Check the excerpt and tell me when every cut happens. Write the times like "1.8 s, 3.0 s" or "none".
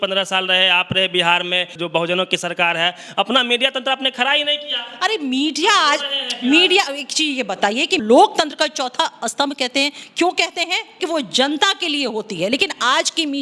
1.8 s, 8.0 s, 11.0 s